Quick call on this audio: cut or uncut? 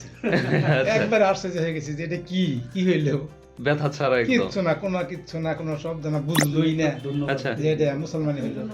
uncut